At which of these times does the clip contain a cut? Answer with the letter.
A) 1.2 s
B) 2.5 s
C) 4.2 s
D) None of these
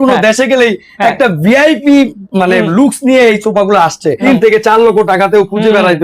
C